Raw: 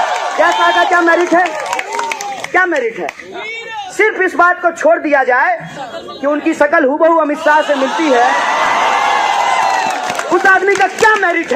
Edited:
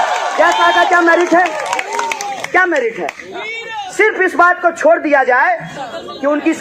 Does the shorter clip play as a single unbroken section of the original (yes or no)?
yes